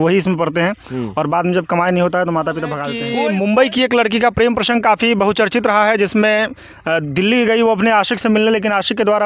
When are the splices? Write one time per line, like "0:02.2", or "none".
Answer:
0:03.0